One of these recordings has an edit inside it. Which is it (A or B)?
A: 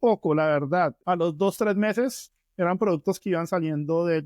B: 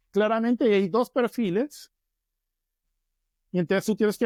A